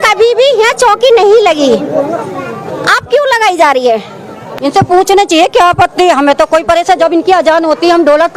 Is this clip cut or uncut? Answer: cut